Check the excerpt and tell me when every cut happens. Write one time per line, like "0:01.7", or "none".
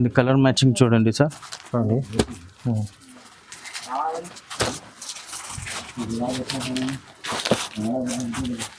none